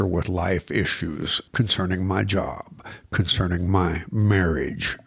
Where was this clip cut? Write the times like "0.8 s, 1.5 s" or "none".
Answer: 1.4 s